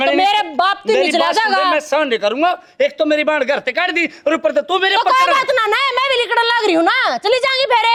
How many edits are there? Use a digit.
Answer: 0